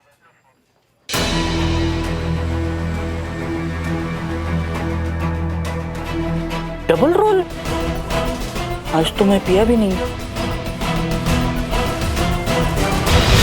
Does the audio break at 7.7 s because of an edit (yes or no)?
yes